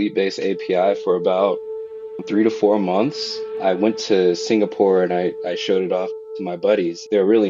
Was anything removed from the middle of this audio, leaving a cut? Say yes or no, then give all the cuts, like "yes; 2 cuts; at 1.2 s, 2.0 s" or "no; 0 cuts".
yes; 1 cut; at 6.2 s